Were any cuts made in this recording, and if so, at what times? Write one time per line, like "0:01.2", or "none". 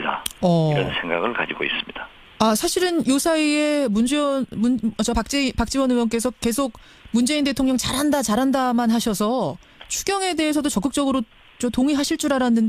0:04.1